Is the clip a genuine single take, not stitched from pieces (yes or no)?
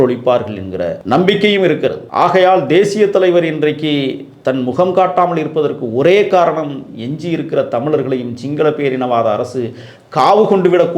no